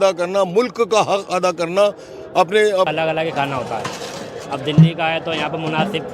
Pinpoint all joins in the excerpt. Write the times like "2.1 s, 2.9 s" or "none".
2.9 s